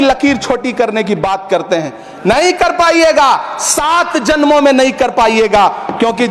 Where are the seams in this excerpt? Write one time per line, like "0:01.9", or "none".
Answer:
none